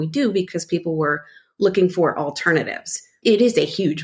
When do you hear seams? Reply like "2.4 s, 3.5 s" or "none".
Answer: 3.1 s